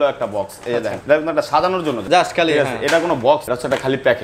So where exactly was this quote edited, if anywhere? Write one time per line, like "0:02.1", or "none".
0:01.0
0:02.0
0:03.5